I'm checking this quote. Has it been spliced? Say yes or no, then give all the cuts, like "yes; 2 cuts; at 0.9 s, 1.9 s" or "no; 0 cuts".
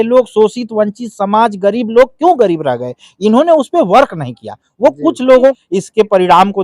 yes; 1 cut; at 5.6 s